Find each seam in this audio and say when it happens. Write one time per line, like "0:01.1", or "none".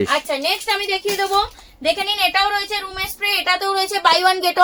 none